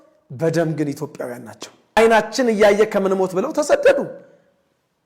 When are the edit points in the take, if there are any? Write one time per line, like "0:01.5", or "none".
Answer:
0:02.0